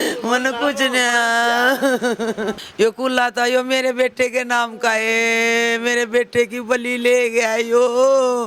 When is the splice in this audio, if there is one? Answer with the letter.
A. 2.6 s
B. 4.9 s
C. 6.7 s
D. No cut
A